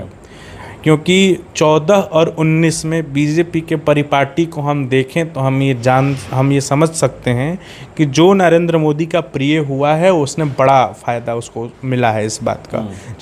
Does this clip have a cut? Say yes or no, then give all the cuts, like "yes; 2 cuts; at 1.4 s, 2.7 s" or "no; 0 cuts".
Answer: no; 0 cuts